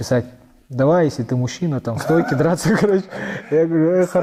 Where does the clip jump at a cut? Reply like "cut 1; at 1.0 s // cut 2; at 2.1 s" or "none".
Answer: none